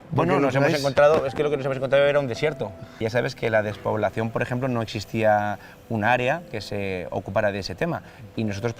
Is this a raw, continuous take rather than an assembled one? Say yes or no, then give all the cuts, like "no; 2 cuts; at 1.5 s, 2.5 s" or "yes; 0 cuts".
no; 1 cut; at 3.0 s